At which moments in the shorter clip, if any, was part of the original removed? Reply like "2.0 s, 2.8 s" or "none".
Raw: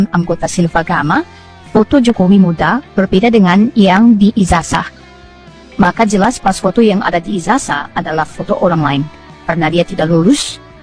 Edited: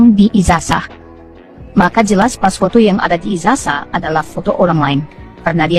none